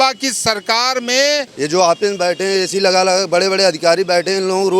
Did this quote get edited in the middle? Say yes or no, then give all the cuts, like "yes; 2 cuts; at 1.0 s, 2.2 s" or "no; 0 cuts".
yes; 1 cut; at 1.5 s